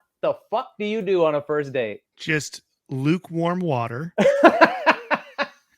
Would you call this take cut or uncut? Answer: cut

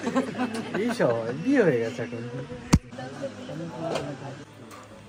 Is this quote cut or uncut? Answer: uncut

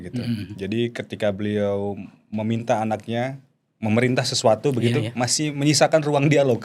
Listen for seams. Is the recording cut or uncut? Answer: uncut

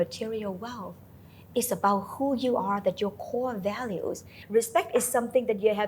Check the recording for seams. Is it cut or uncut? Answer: cut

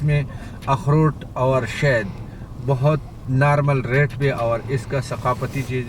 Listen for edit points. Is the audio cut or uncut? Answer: uncut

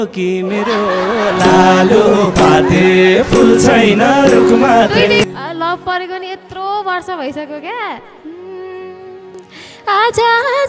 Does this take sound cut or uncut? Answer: cut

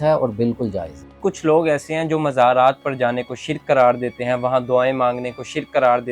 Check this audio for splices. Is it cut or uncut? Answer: cut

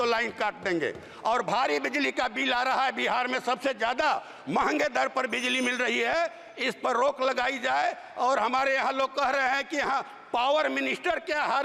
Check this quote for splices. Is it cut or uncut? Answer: uncut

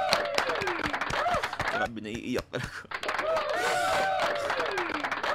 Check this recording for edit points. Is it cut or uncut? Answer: uncut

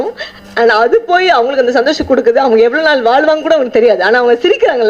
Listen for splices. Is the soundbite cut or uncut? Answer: uncut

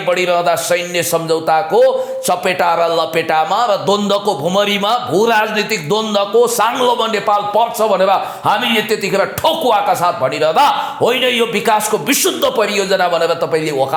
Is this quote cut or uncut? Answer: uncut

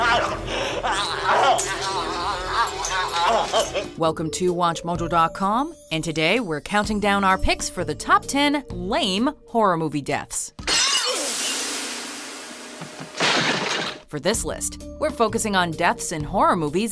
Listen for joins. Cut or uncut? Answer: cut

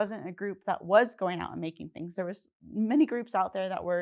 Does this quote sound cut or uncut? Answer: uncut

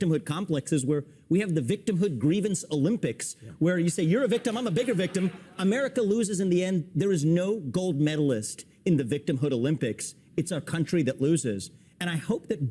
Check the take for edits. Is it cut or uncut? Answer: uncut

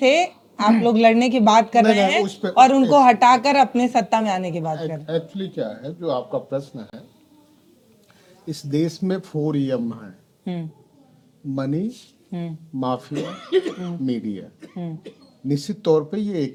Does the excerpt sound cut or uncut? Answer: uncut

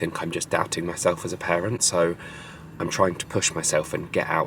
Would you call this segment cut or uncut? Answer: uncut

